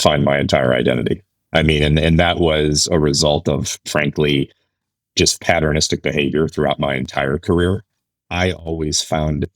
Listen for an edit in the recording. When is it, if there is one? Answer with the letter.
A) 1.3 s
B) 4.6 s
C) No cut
C